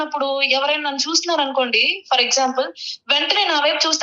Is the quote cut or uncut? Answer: uncut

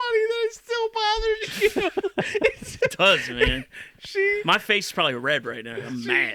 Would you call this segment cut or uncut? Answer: uncut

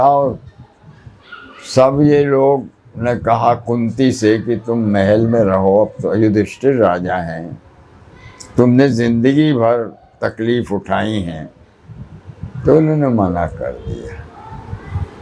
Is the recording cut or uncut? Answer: uncut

